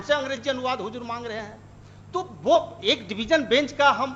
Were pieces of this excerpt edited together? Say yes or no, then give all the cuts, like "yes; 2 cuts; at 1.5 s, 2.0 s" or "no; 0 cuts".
no; 0 cuts